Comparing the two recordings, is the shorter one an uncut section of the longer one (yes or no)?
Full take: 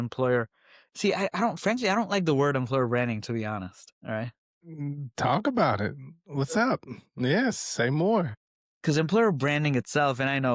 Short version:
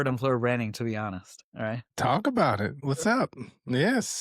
no